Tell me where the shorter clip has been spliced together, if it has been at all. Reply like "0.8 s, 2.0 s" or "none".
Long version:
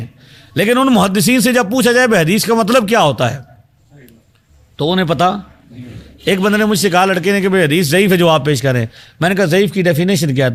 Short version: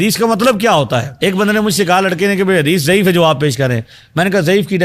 1.1 s